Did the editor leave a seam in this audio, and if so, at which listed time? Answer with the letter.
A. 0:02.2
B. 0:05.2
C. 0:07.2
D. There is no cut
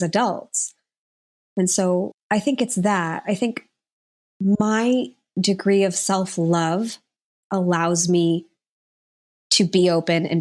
A